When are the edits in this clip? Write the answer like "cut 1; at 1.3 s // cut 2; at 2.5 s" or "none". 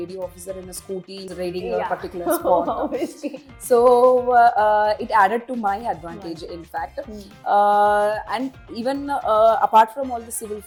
none